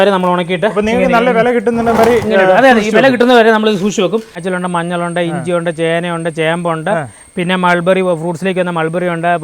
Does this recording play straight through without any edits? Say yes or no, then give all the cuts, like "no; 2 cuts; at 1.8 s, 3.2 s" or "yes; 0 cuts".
no; 1 cut; at 4.4 s